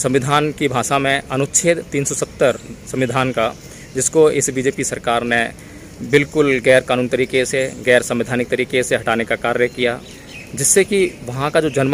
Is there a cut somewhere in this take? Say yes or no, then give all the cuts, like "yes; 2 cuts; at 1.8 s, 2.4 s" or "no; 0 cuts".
no; 0 cuts